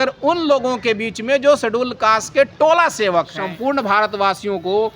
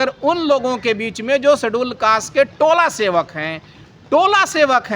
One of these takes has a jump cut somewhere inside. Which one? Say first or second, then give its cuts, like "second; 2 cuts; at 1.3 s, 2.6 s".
first; 1 cut; at 3.4 s